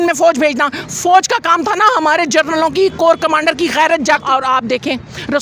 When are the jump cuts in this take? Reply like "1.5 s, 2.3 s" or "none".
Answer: 4.2 s